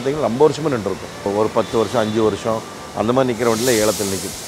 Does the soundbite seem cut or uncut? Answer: cut